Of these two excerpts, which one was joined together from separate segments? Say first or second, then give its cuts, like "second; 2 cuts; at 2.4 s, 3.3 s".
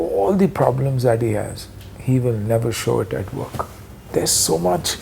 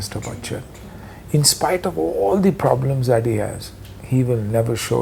first; 1 cut; at 4.1 s